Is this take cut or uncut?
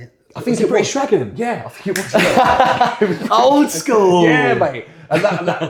uncut